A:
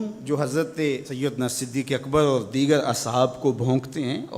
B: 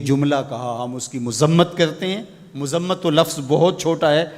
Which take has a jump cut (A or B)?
A